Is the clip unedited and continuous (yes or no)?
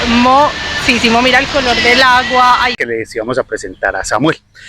no